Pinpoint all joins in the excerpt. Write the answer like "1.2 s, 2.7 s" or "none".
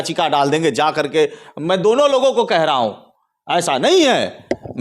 none